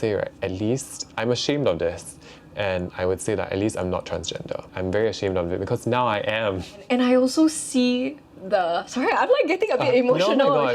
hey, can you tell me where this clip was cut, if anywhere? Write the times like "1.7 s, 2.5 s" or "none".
4.7 s, 6.8 s